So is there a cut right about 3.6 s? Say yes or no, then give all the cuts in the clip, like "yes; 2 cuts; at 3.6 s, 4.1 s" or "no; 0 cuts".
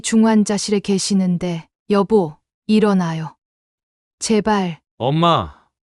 no; 2 cuts; at 1.7 s, 4.8 s